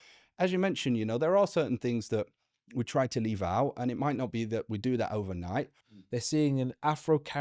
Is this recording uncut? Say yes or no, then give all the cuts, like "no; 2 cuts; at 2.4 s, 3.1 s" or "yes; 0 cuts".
no; 1 cut; at 5.8 s